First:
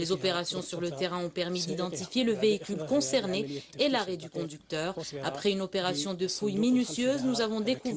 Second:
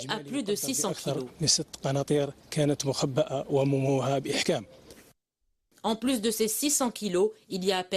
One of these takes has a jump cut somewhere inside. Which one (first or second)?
second